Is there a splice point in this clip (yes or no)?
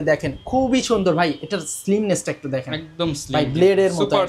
no